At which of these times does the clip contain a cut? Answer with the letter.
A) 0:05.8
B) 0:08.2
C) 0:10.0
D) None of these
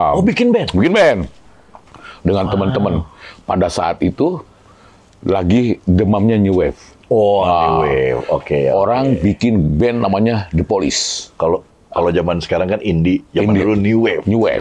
D